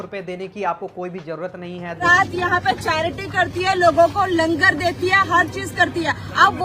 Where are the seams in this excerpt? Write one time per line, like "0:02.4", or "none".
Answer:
0:02.0